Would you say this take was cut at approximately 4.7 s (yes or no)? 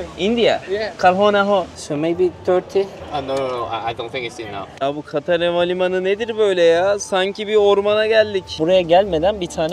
yes